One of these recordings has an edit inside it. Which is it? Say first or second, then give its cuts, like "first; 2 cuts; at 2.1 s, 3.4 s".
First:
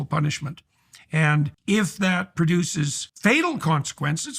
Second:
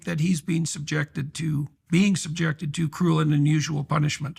first; 2 cuts; at 1.6 s, 3.0 s